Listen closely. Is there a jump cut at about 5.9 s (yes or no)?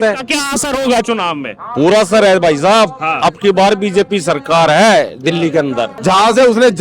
yes